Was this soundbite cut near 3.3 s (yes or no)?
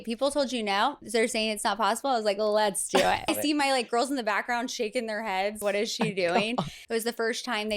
yes